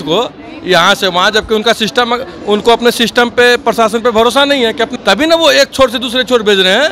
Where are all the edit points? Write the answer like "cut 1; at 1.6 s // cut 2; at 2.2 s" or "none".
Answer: cut 1; at 4.9 s

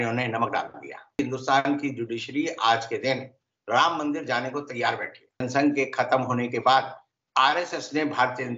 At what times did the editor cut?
cut 1; at 1.2 s // cut 2; at 5.4 s

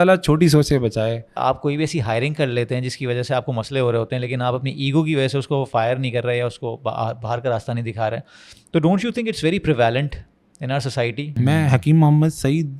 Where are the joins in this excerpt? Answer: cut 1; at 1.4 s // cut 2; at 11.3 s

